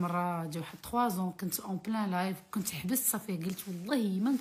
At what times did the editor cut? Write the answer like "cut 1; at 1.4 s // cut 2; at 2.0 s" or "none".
none